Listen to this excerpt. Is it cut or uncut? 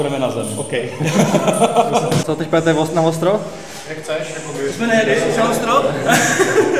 cut